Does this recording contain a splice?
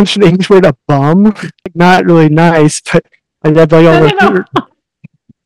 yes; 1 cut; at 1.7 s

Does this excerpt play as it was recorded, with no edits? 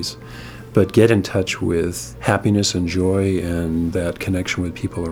no; 2 cuts; at 2.1 s, 4.1 s

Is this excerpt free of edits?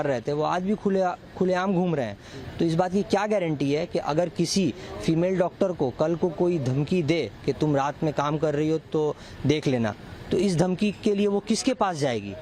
yes; 0 cuts

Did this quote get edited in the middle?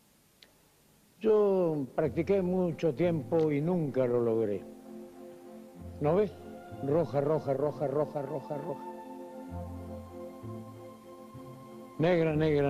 no; 0 cuts

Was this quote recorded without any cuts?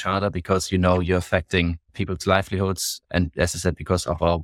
no; 1 cut; at 1.9 s

